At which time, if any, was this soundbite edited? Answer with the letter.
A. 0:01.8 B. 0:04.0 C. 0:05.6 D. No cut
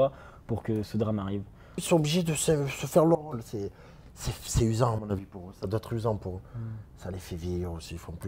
A